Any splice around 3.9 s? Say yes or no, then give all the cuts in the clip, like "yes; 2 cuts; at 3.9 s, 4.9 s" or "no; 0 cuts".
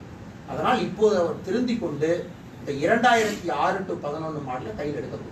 no; 0 cuts